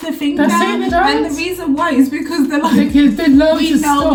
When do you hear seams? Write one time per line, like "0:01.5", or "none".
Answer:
none